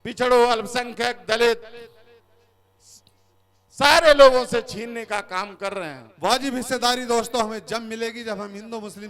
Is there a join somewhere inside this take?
yes; 1 cut; at 6.0 s

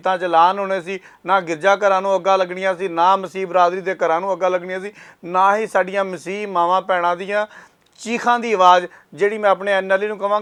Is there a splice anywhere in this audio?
no; 0 cuts

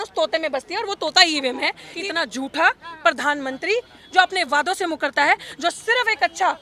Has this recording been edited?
yes; 1 cut; at 1.8 s

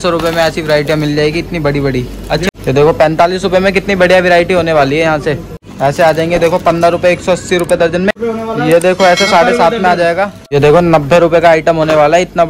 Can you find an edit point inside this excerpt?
yes; 4 cuts; at 2.4 s, 5.6 s, 8.1 s, 10.4 s

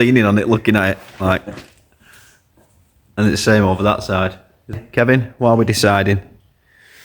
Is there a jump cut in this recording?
yes; 1 cut; at 4.8 s

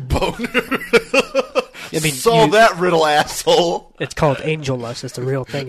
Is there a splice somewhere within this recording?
no; 0 cuts

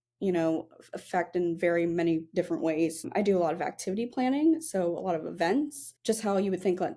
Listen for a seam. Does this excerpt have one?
yes; 2 cuts; at 3.1 s, 5.9 s

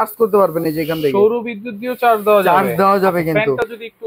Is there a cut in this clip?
no; 0 cuts

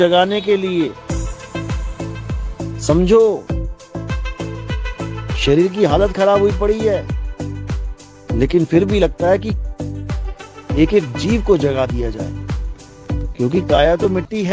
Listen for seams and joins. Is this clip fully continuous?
no; 4 cuts; at 3.4 s, 5.4 s, 7.0 s, 8.3 s

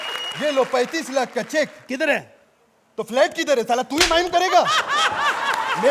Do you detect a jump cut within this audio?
no; 0 cuts

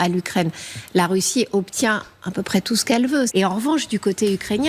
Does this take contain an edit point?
yes; 1 cut; at 3.3 s

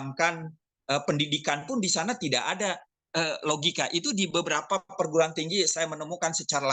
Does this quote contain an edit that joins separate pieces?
no; 0 cuts

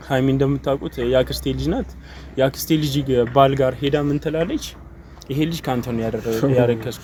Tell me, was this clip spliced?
no; 0 cuts

